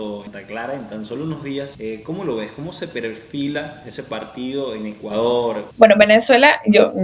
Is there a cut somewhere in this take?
yes; 1 cut; at 5.7 s

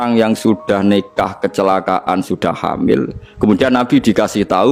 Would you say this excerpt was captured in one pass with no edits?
yes; 0 cuts

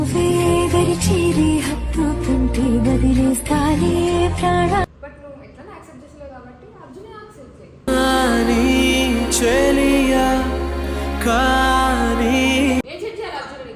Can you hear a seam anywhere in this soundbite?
no; 0 cuts

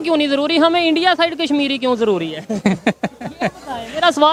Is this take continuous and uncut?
yes; 0 cuts

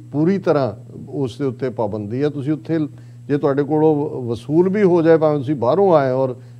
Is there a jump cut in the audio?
no; 0 cuts

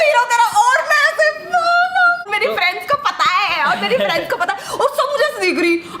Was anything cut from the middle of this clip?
no; 0 cuts

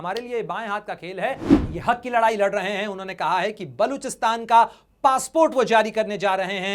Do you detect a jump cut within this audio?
yes; 1 cut; at 1.5 s

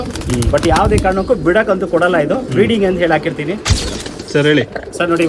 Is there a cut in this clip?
yes; 1 cut; at 3.9 s

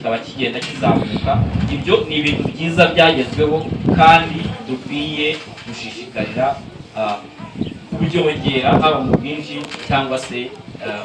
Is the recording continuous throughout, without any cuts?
yes; 0 cuts

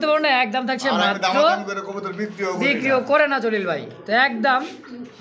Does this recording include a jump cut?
no; 0 cuts

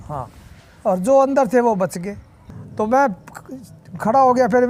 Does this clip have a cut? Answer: yes; 1 cut; at 2.4 s

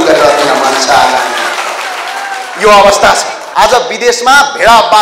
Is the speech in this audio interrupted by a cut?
yes; 1 cut; at 3.4 s

